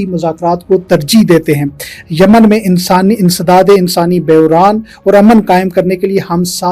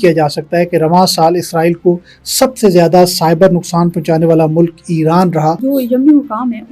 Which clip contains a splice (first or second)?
second